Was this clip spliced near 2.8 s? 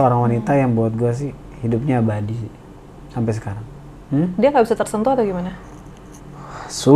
no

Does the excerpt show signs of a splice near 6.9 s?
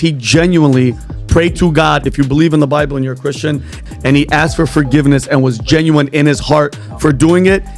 no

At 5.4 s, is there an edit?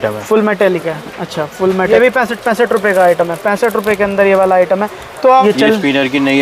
yes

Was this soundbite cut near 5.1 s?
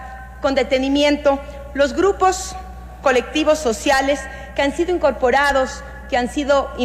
no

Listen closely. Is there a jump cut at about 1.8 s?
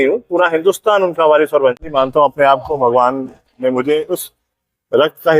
yes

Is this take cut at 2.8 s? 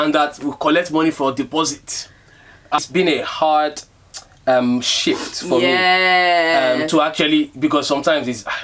yes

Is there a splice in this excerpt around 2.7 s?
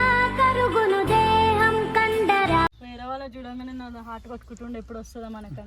yes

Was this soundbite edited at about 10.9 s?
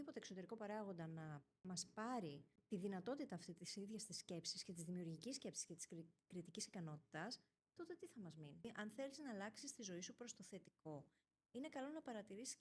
no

